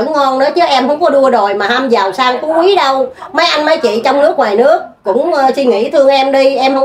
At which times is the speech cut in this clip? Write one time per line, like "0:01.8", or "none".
none